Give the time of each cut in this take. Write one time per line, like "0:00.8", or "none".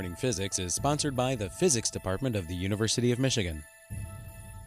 0:03.7

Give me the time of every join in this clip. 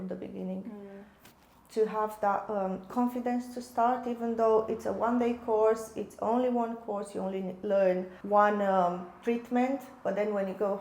0:08.1

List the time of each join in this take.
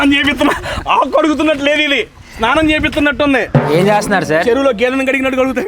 0:03.7

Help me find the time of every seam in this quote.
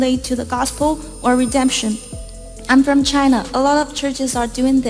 0:03.7

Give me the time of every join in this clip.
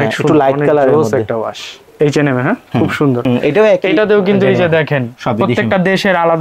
0:01.8
0:03.2

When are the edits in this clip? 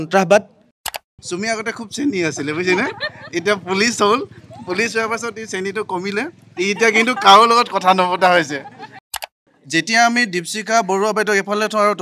0:01.2
0:09.0

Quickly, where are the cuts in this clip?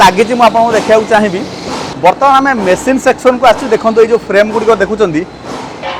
0:01.8

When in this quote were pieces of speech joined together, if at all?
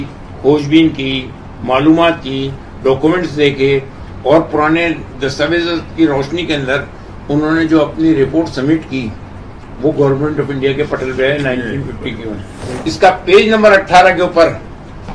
0:12.9

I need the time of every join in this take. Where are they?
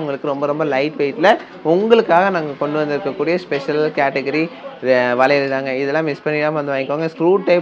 none

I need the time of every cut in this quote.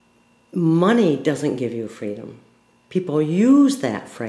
none

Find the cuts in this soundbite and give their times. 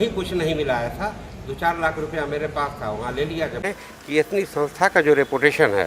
0:03.7

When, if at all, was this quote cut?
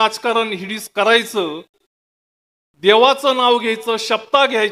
none

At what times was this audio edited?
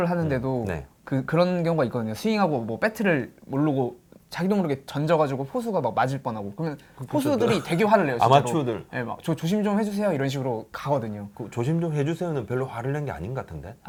none

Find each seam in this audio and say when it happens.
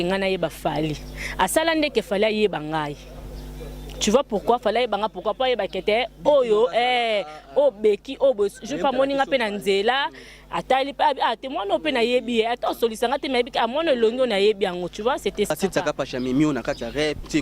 0:15.5

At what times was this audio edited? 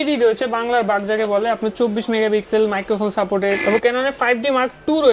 0:03.3

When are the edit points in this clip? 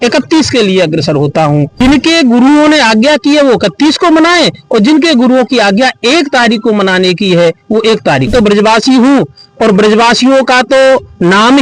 0:01.8
0:08.3

